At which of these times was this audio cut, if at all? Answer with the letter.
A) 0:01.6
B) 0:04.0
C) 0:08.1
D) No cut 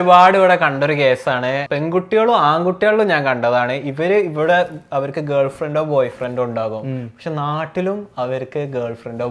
A